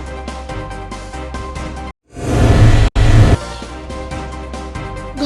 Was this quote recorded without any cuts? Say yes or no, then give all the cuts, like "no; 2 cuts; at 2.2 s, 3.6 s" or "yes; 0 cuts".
no; 1 cut; at 1.4 s